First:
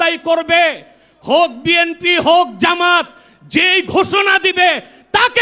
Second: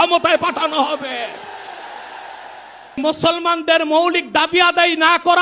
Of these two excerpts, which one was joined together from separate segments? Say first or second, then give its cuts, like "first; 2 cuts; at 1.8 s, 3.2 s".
second; 1 cut; at 3.0 s